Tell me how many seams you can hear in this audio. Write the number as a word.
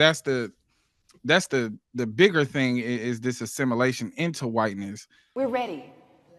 one